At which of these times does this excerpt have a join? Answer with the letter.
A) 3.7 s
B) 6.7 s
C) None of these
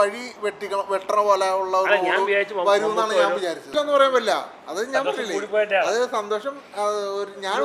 A